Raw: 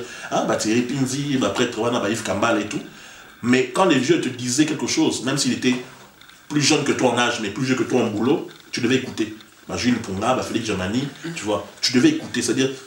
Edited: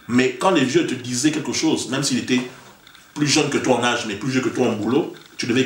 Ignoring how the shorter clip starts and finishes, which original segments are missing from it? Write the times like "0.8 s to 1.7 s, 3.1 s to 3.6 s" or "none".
none